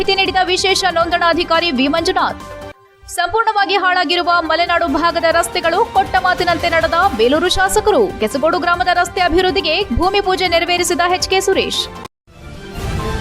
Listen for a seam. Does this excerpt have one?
yes; 1 cut; at 12.1 s

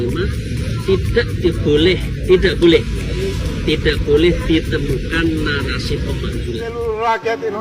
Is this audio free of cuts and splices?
no; 1 cut; at 6.6 s

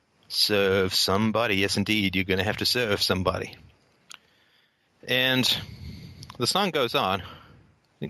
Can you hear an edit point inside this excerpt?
yes; 1 cut; at 3.0 s

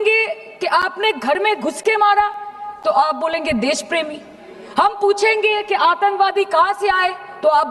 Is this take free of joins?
yes; 0 cuts

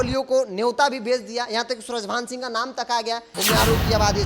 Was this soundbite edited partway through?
yes; 1 cut; at 3.4 s

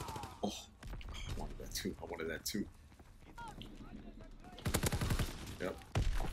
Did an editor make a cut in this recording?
yes; 1 cut; at 3.4 s

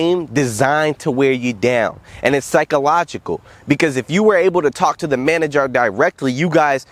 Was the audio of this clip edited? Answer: no; 0 cuts

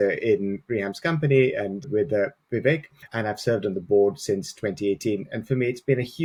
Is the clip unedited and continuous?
yes; 0 cuts

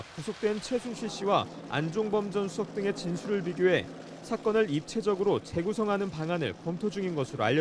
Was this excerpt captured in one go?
no; 1 cut; at 4.5 s

